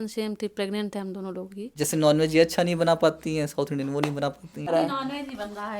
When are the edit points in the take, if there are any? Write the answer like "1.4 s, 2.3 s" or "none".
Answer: 1.8 s, 4.7 s